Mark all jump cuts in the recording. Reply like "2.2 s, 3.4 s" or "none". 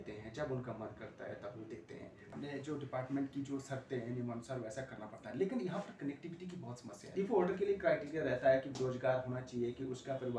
2.3 s, 7.1 s

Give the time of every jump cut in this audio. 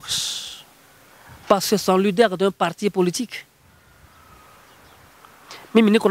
none

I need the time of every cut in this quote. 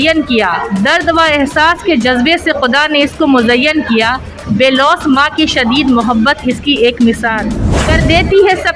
7.5 s

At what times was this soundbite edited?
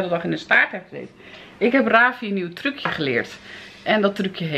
none

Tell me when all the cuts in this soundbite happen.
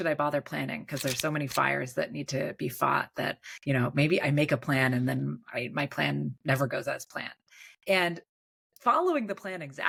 none

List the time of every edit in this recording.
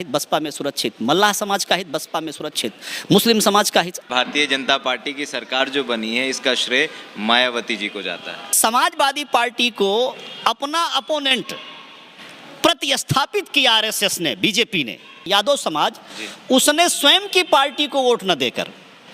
4.1 s, 8.4 s, 15.2 s

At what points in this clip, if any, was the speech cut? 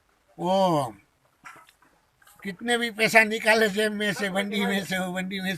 none

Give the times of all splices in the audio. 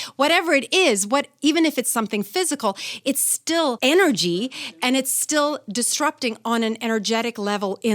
3.8 s

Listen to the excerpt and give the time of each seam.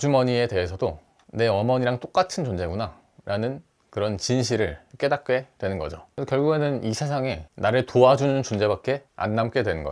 none

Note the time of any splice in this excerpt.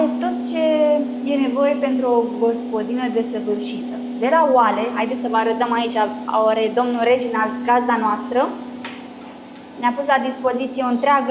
none

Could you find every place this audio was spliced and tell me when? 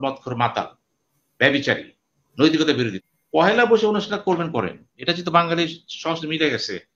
3.0 s

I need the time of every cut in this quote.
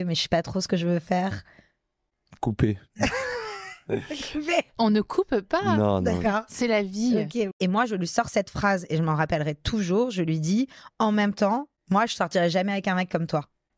7.5 s

